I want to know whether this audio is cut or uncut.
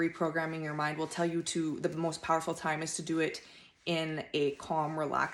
uncut